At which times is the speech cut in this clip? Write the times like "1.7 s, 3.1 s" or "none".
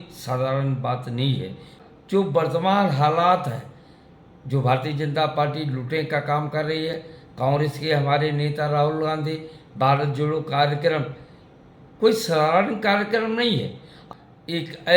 1.8 s, 14.0 s